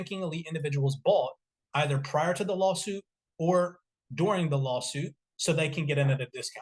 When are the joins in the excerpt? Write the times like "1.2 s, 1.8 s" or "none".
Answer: 5.2 s